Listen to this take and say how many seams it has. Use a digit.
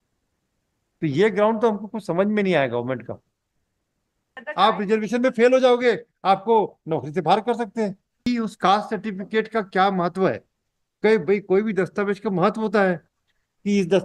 2